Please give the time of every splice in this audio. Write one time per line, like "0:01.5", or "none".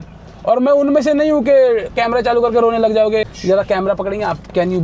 0:03.2